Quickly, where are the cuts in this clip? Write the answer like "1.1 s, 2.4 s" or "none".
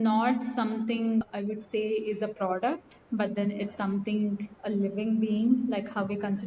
1.2 s

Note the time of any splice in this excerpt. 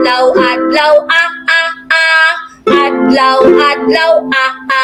none

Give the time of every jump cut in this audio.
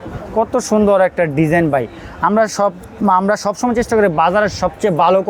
none

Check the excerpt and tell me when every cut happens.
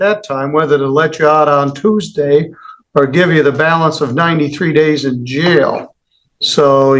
none

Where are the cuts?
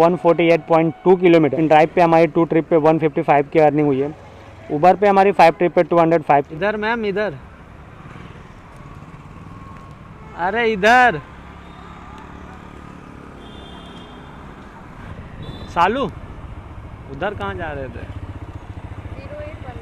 1.5 s, 6.5 s, 15.3 s

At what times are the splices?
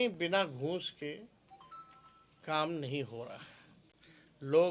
none

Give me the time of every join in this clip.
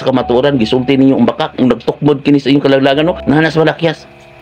3.2 s

